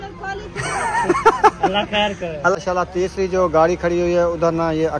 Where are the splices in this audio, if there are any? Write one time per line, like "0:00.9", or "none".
0:02.5